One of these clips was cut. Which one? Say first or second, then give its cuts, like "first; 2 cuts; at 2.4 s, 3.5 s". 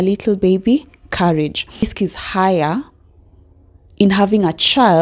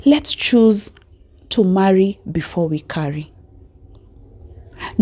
first; 1 cut; at 1.9 s